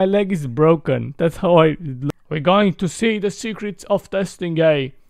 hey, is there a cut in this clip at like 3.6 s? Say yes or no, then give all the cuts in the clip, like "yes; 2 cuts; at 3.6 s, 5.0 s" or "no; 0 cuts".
no; 1 cut; at 1.9 s